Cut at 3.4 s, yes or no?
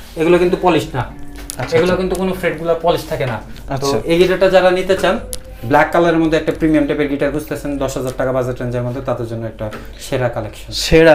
no